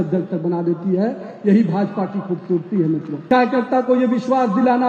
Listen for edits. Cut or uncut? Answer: cut